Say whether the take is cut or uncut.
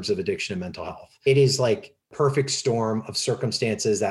cut